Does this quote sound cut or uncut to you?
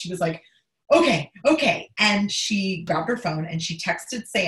cut